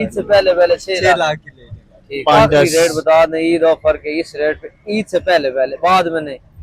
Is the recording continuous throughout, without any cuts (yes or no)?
no